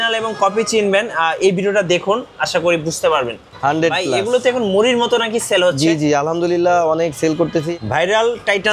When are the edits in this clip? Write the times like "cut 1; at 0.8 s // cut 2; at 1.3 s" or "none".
cut 1; at 3.4 s // cut 2; at 7.7 s